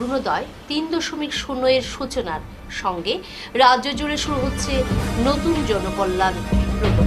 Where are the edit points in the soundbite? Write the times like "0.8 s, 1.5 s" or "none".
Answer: none

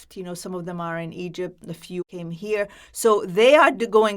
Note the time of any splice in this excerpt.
2.0 s

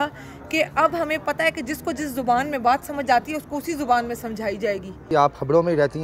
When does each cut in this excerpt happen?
5.0 s

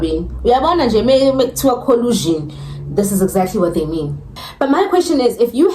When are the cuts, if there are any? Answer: 4.3 s

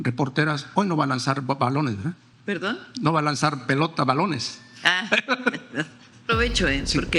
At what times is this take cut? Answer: 2.3 s, 6.2 s

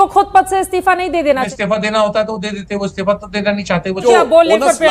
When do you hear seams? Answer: 1.5 s, 4.0 s

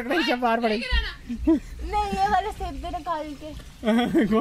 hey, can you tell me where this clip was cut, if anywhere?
none

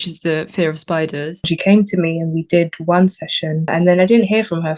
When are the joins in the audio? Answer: 1.5 s, 3.7 s

